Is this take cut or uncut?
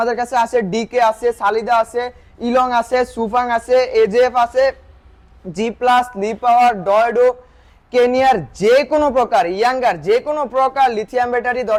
uncut